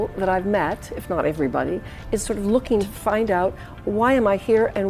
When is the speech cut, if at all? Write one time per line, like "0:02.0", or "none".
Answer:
0:02.9